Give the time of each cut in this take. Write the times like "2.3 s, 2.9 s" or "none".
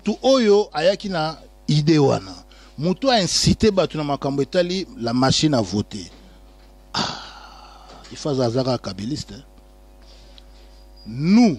10.2 s